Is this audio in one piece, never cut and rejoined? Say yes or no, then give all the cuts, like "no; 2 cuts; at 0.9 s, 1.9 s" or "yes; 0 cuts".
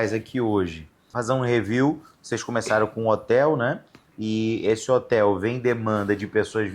no; 1 cut; at 1.1 s